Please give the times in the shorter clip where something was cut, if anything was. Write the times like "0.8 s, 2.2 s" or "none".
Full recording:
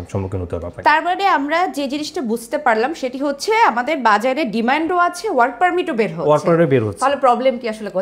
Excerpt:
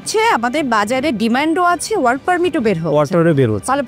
none